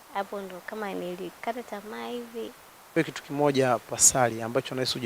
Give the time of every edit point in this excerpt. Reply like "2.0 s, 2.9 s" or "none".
2.9 s